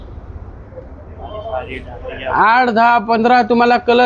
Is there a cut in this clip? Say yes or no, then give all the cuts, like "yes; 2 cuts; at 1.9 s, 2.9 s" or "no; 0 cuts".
no; 0 cuts